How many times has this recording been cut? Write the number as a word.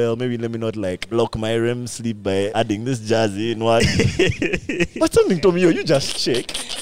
two